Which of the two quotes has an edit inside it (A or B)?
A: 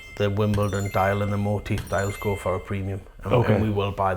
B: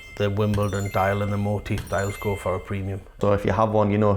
B